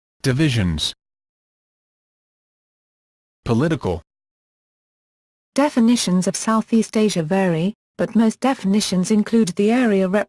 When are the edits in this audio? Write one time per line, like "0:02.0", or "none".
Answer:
0:06.2